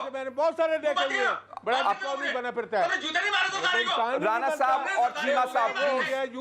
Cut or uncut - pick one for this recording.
uncut